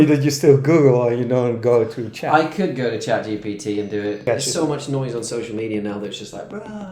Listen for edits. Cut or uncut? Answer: cut